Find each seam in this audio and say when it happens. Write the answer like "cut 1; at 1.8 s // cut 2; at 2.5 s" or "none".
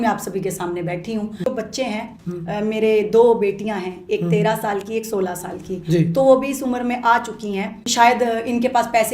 cut 1; at 1.4 s // cut 2; at 7.9 s